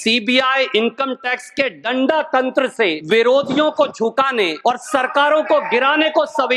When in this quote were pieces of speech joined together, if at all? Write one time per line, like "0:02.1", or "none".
0:03.0
0:04.5